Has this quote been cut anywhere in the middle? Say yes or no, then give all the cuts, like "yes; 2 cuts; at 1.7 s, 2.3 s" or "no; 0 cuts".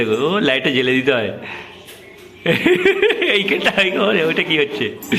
no; 0 cuts